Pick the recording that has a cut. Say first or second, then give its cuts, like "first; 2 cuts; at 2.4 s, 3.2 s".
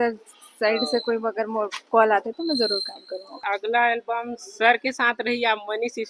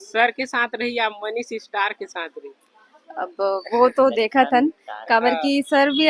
first; 1 cut; at 3.4 s